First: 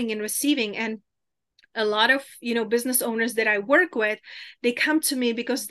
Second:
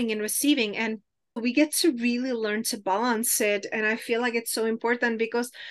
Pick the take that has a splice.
second; 1 cut; at 1.4 s

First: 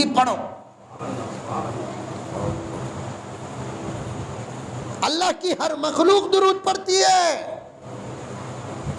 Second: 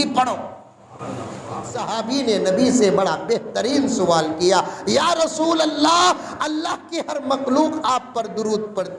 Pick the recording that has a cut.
second; 1 cut; at 1.9 s

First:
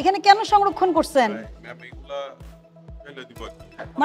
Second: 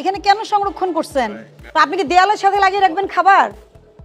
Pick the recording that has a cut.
second; 1 cut; at 1.5 s

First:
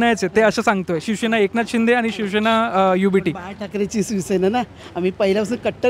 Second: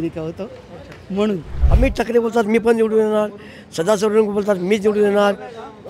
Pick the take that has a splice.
second; 1 cut; at 1.5 s

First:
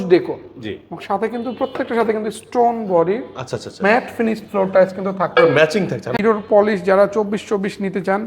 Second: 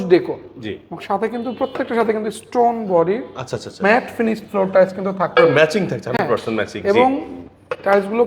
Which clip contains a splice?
first; 1 cut; at 6.1 s

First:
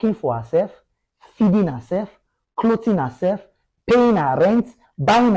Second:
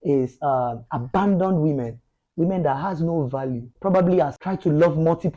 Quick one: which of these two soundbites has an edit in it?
second; 2 cuts; at 3.7 s, 4.4 s

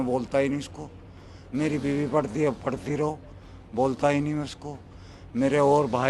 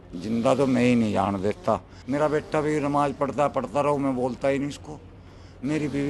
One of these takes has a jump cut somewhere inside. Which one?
second; 1 cut; at 1.9 s

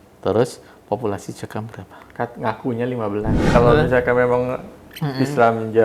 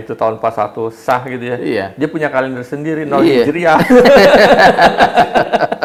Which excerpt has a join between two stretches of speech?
first; 1 cut; at 3.5 s

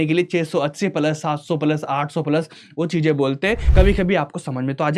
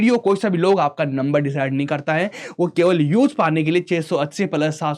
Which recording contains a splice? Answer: first; 1 cut; at 3.6 s

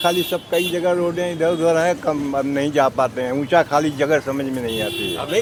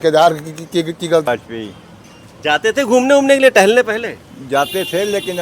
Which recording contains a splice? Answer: second; 1 cut; at 1.3 s

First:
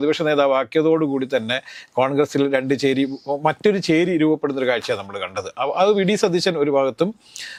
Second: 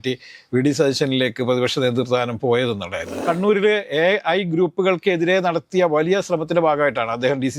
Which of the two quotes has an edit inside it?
second; 1 cut; at 3.2 s

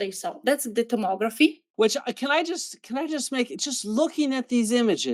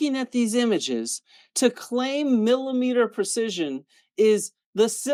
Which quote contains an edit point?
first; 1 cut; at 1.6 s

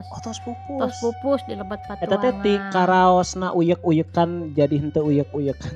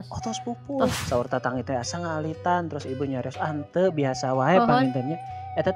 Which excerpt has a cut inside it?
second; 1 cut; at 1.0 s

